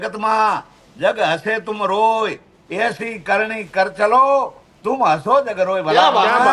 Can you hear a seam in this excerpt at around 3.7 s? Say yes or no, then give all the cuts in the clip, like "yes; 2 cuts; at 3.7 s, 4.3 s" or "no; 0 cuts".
no; 0 cuts